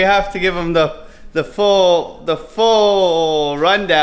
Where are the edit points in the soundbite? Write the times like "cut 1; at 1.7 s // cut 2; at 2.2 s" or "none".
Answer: none